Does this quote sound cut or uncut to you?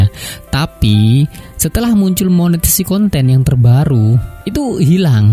cut